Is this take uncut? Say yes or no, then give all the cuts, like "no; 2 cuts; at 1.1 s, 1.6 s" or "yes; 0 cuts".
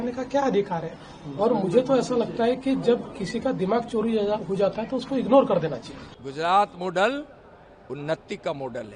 yes; 0 cuts